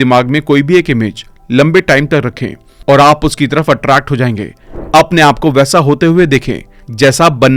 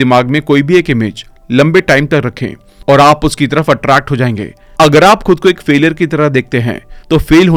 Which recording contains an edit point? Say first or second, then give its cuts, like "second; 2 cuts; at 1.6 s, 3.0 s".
first; 1 cut; at 4.6 s